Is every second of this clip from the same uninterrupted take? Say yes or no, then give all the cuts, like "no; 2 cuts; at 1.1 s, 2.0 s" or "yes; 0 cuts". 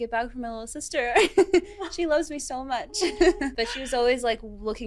no; 1 cut; at 3.5 s